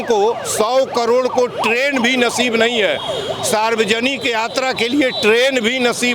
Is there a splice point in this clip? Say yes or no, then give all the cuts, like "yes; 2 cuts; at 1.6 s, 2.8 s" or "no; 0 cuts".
no; 0 cuts